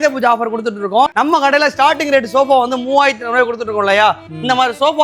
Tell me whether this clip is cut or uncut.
cut